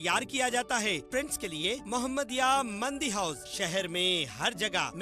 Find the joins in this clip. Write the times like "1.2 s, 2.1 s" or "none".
1.0 s